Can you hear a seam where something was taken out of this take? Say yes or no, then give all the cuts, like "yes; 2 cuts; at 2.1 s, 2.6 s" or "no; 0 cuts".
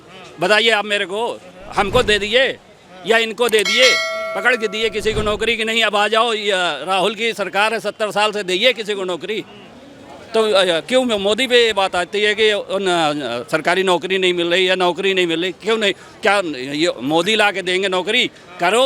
no; 0 cuts